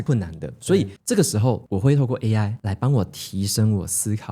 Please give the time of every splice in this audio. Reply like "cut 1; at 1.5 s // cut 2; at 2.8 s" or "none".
cut 1; at 1.0 s // cut 2; at 2.6 s